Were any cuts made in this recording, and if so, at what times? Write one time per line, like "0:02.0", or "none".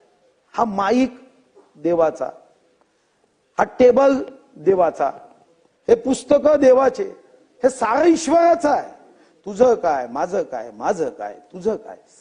none